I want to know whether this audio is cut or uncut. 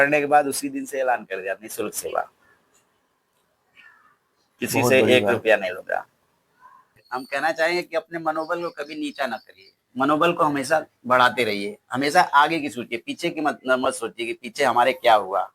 cut